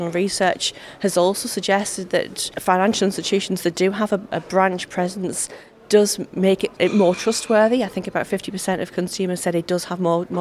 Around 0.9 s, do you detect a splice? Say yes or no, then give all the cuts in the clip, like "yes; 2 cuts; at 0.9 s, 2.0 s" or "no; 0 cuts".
no; 2 cuts; at 2.4 s, 6.7 s